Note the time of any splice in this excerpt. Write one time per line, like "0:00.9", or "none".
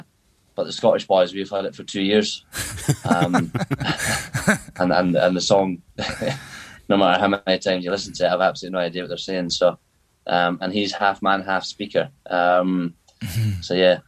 none